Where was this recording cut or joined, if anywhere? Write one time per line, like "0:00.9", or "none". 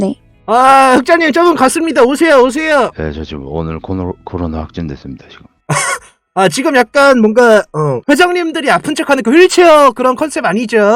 0:02.9